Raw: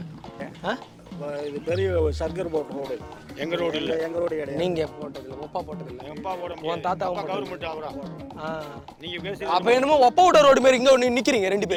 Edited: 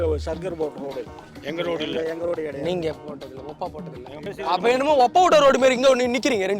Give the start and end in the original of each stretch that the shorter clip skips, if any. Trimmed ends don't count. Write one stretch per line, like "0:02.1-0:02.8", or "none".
0:06.2-0:09.3